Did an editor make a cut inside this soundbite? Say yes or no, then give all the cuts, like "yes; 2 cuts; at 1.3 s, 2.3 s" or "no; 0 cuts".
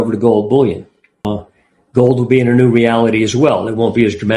yes; 1 cut; at 1.2 s